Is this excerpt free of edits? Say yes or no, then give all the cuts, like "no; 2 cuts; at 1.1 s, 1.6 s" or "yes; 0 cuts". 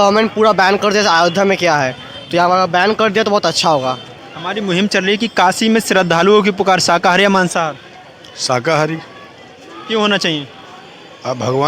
yes; 0 cuts